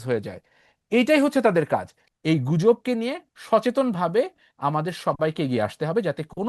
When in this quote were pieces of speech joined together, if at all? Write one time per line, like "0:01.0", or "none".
0:02.0